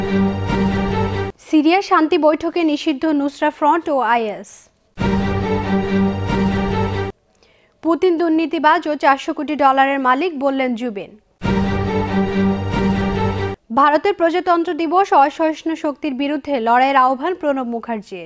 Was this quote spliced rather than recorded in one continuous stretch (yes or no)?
yes